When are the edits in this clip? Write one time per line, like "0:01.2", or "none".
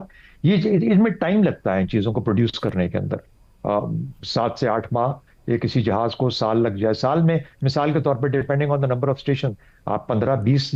none